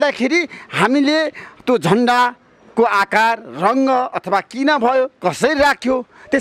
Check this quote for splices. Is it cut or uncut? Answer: uncut